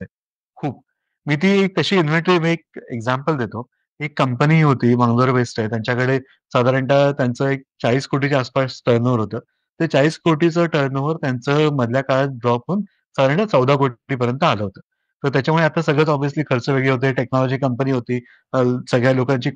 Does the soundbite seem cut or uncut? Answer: uncut